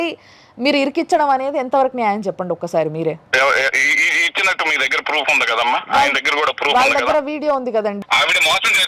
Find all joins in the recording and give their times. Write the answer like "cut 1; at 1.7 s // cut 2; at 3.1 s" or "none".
cut 1; at 3.2 s // cut 2; at 8.0 s